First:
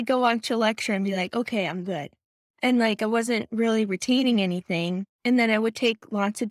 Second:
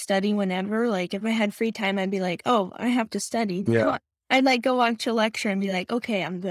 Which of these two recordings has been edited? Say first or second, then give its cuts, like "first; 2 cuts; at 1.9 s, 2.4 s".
first; 1 cut; at 5.1 s